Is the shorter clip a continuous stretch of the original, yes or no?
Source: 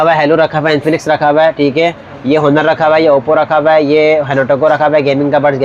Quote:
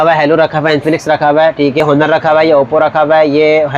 no